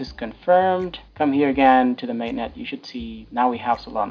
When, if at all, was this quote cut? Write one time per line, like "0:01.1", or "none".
0:01.0
0:03.2